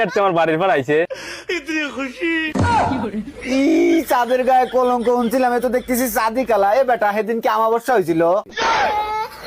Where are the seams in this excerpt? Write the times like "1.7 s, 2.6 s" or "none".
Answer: none